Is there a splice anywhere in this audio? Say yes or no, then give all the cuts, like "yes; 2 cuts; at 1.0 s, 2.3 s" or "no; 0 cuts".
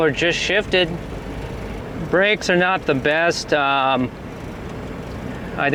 no; 0 cuts